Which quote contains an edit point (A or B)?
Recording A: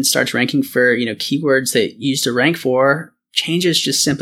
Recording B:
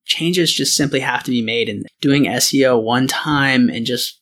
B